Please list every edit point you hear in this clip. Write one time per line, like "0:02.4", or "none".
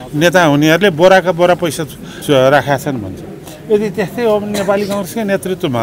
0:02.1